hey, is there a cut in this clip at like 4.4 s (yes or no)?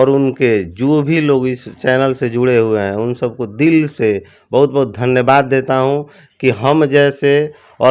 no